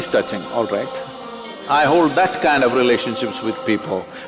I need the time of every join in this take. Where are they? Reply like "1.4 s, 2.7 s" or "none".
1.5 s